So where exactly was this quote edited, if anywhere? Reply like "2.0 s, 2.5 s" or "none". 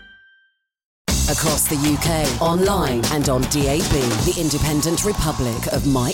1.0 s